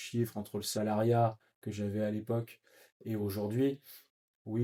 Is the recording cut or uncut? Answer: uncut